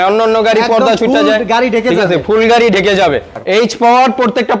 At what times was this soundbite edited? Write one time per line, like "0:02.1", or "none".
0:03.4